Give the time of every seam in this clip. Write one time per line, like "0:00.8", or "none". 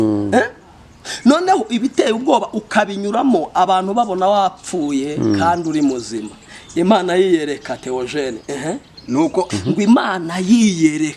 0:09.5